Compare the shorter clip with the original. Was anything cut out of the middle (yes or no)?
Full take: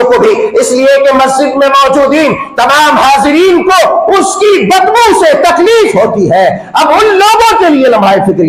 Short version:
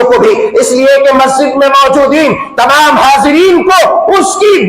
no